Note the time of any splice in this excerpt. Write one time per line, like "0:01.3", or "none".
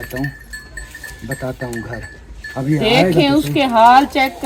none